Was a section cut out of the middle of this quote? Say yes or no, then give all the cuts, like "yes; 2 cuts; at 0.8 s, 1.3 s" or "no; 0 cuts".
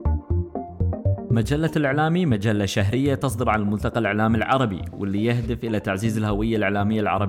yes; 1 cut; at 1.3 s